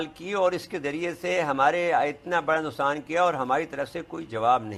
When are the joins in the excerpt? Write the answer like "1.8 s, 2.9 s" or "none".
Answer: none

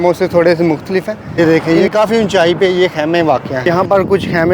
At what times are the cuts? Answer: 1.4 s, 3.5 s

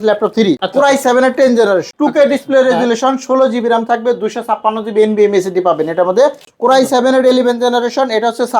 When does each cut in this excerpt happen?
6.5 s

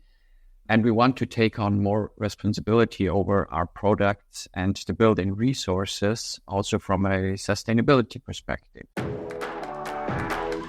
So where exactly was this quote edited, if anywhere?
8.9 s

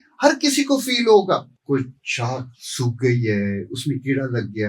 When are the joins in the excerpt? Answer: 1.5 s

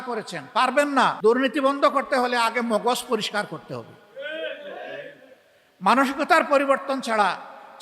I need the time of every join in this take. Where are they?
1.2 s

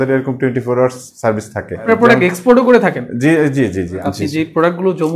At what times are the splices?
1.9 s, 4.0 s

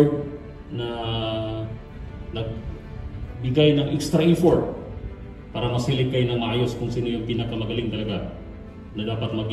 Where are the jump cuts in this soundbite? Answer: none

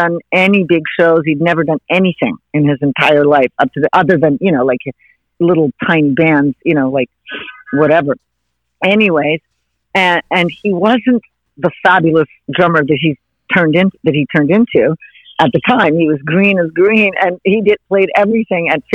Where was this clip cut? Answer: 11.4 s

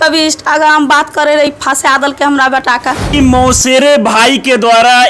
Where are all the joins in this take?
3.1 s

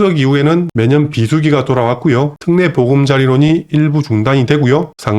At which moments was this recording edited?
2.4 s

